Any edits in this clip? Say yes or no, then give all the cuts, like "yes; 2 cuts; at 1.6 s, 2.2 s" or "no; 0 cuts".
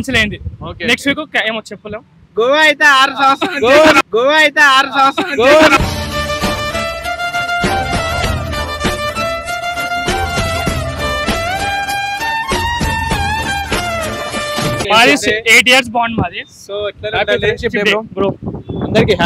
yes; 1 cut; at 14.8 s